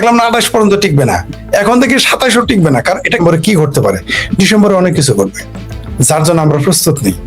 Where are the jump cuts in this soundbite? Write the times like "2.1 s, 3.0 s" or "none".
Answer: 3.2 s